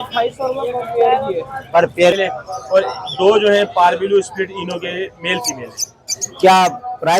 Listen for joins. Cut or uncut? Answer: cut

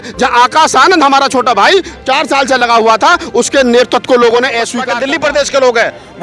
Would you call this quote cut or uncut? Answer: cut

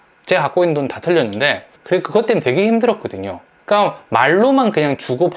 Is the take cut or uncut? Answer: cut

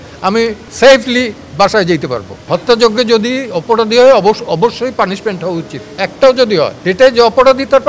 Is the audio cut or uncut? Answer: cut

